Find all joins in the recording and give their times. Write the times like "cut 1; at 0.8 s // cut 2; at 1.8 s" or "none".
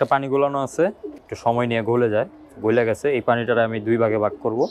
cut 1; at 1.2 s